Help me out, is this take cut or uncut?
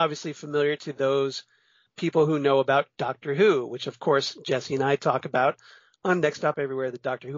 cut